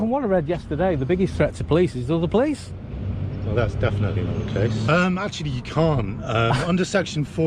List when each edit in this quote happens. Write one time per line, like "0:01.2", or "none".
0:04.8